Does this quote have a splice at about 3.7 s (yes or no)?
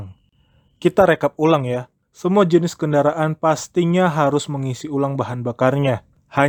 no